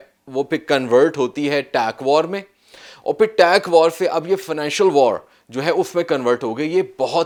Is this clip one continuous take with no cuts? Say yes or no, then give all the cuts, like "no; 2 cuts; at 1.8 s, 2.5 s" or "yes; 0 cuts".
yes; 0 cuts